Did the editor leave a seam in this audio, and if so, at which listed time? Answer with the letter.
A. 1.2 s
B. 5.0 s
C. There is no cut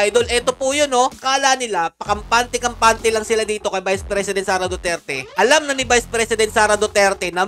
A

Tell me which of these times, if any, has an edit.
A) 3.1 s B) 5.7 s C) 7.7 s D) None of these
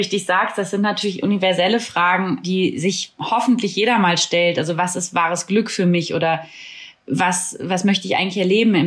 A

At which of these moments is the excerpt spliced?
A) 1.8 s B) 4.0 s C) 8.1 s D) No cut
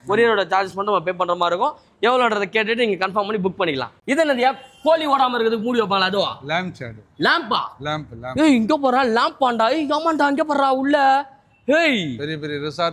D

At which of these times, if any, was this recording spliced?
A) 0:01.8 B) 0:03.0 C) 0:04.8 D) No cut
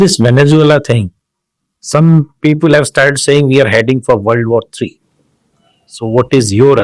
D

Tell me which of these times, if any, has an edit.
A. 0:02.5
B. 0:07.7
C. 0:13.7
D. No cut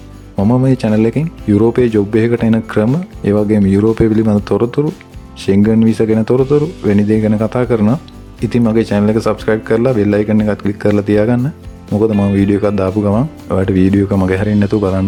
D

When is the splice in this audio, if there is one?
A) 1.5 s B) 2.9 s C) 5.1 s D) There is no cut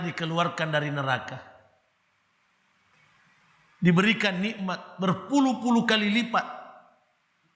B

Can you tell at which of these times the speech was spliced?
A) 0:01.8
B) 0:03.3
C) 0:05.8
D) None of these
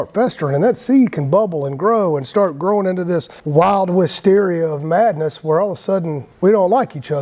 D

